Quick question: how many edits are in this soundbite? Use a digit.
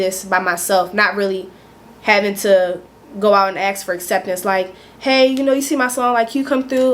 0